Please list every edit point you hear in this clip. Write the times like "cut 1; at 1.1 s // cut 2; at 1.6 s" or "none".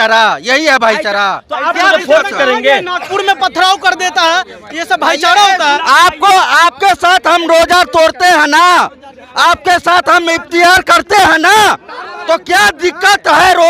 none